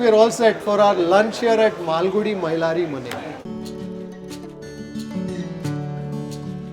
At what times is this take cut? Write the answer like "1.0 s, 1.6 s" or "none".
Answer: 3.4 s